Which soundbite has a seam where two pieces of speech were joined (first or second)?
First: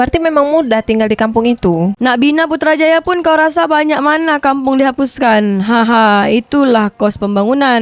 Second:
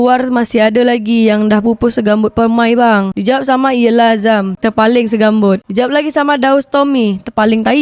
first